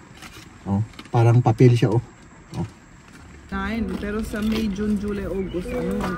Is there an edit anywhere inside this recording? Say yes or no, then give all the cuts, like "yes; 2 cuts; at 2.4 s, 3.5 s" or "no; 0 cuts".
yes; 1 cut; at 3.5 s